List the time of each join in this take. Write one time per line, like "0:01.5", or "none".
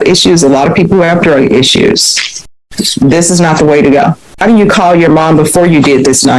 0:04.4